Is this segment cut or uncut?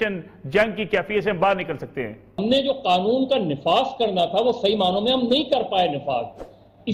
uncut